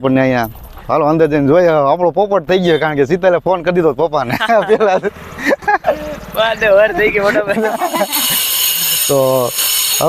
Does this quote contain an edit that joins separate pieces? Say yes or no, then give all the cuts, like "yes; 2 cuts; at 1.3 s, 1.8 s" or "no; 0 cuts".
yes; 1 cut; at 7.7 s